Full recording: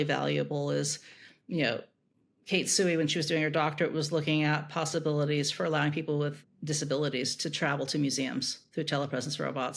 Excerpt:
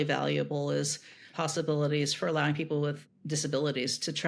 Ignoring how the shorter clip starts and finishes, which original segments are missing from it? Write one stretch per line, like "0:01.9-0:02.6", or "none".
0:01.3-0:04.7